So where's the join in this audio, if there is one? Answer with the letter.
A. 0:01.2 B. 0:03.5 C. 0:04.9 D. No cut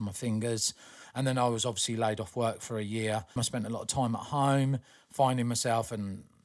B